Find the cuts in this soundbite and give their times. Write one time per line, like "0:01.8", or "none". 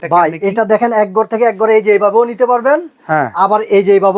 none